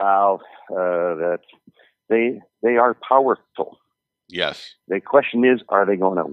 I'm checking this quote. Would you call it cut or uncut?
uncut